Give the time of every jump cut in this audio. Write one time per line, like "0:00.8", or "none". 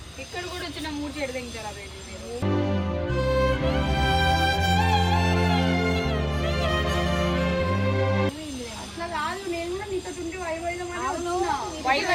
none